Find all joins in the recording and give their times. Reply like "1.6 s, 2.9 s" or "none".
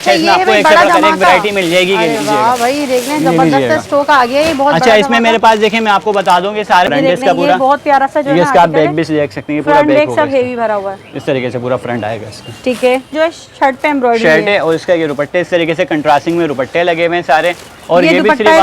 6.9 s, 13.1 s